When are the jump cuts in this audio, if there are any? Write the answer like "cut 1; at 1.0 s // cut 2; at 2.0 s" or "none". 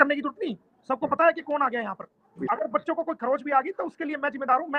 cut 1; at 2.4 s